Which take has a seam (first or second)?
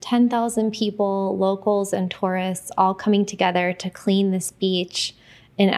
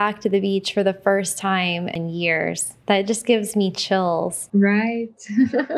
second